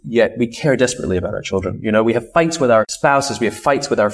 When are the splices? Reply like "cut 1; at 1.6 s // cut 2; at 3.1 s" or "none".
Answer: cut 1; at 2.9 s